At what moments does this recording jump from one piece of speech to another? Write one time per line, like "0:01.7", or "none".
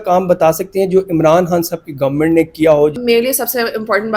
0:03.0